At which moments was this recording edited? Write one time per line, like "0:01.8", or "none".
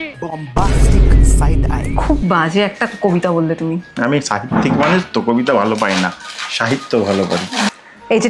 none